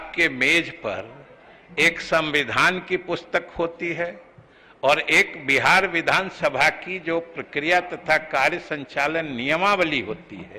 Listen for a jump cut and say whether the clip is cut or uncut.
uncut